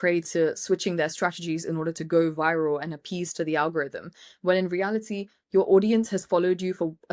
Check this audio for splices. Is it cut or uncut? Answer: uncut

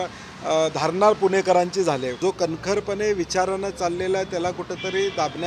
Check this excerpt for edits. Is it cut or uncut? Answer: cut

